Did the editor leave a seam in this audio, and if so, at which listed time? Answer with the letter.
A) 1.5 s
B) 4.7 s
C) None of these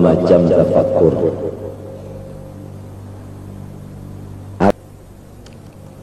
B